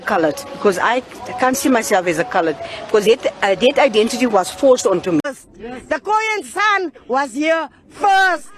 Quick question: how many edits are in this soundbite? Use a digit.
1